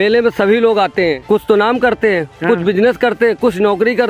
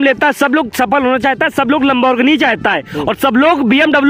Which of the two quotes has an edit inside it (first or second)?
first